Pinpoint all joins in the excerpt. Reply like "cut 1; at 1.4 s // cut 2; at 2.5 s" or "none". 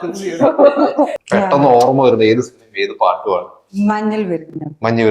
cut 1; at 1.2 s